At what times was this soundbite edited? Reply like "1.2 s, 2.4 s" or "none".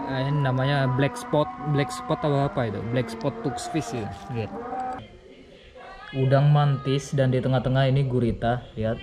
5.0 s